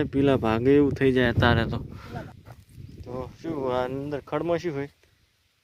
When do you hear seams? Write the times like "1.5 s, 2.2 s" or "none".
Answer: 2.3 s